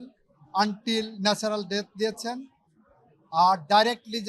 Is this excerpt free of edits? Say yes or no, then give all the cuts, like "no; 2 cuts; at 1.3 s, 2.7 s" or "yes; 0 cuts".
yes; 0 cuts